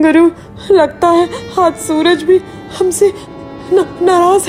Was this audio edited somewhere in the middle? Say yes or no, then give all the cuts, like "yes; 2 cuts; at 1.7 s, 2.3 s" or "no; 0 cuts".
no; 0 cuts